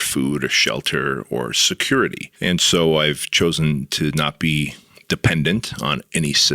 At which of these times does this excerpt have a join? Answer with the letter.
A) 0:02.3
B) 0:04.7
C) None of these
A